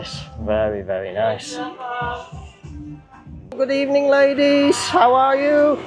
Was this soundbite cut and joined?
yes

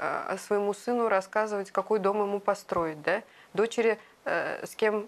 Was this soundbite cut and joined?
no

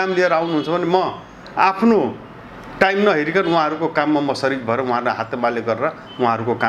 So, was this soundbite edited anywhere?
no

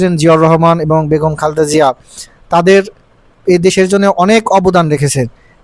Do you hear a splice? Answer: no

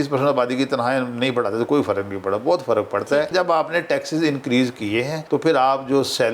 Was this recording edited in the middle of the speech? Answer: yes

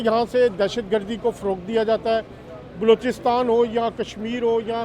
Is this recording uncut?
yes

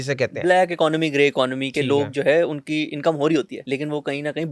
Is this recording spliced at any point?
yes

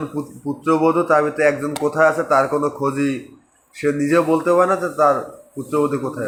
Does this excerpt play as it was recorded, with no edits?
yes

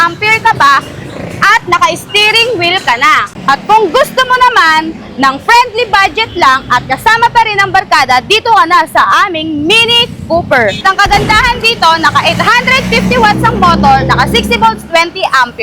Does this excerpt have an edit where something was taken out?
yes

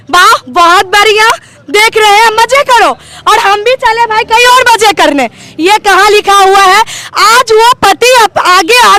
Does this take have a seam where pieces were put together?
no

